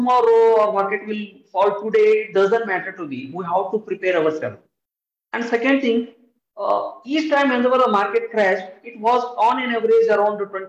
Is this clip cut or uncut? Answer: uncut